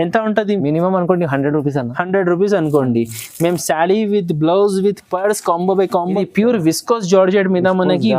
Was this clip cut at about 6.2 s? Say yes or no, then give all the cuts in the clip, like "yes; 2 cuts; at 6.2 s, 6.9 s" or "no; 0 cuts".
yes; 1 cut; at 6.2 s